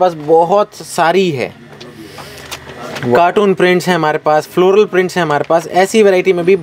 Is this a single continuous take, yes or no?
yes